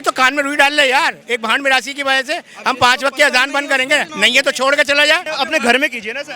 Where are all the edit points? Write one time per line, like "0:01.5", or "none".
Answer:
0:04.1
0:05.3